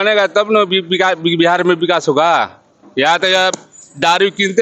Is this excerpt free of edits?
yes; 0 cuts

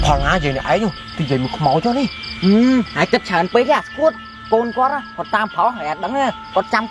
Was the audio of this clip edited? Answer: no; 0 cuts

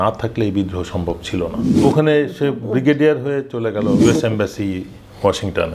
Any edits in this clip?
yes; 2 cuts; at 1.8 s, 4.0 s

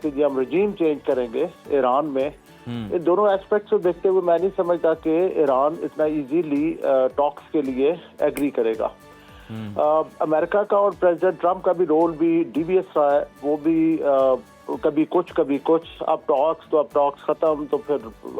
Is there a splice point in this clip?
no; 0 cuts

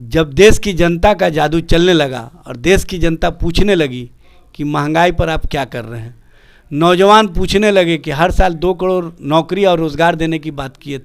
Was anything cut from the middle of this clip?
no; 0 cuts

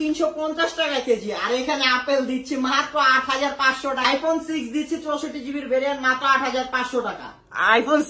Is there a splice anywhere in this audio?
yes; 1 cut; at 4.0 s

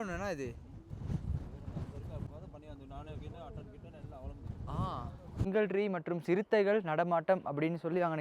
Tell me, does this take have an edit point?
yes; 2 cuts; at 2.3 s, 5.5 s

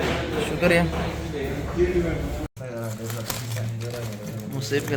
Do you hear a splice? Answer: yes; 1 cut; at 2.4 s

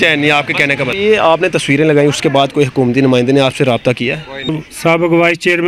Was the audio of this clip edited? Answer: yes; 2 cuts; at 0.9 s, 4.5 s

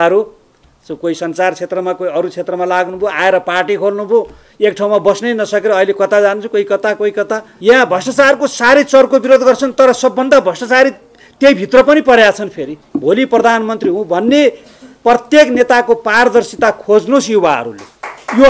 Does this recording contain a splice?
yes; 2 cuts; at 7.5 s, 12.8 s

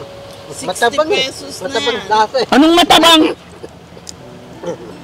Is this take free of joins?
yes; 0 cuts

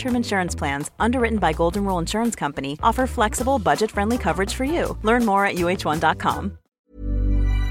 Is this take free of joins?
no; 1 cut; at 6.8 s

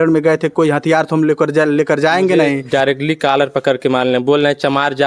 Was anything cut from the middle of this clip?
yes; 1 cut; at 2.6 s

